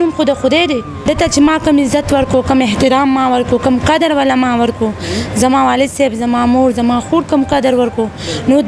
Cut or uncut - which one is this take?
cut